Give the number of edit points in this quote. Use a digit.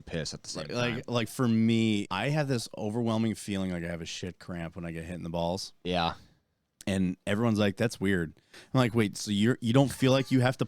1